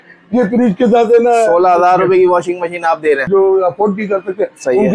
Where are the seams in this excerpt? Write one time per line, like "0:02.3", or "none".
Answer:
0:03.3